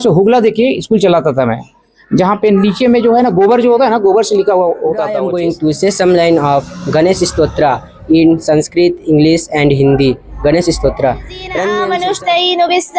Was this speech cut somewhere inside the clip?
yes; 2 cuts; at 5.3 s, 11.9 s

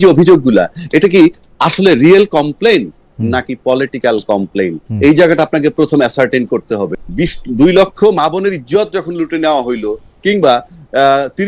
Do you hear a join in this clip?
yes; 1 cut; at 7.0 s

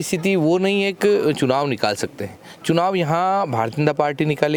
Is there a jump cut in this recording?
no; 0 cuts

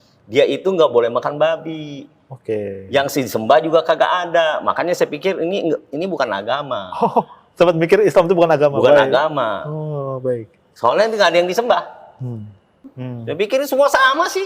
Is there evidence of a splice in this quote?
yes; 1 cut; at 12.8 s

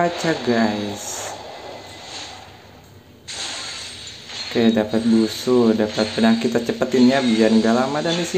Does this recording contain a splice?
no; 0 cuts

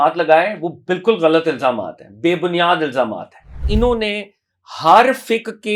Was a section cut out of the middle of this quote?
yes; 1 cut; at 3.7 s

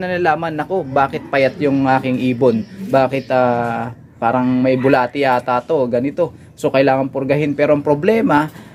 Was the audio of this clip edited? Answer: no; 0 cuts

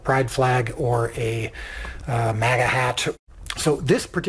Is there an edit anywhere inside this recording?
yes; 1 cut; at 3.1 s

